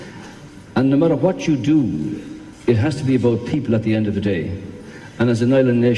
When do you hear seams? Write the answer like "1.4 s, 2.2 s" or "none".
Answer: 3.1 s